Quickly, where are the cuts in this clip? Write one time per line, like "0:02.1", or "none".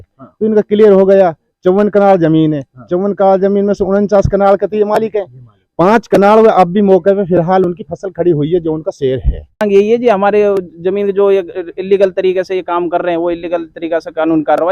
0:09.6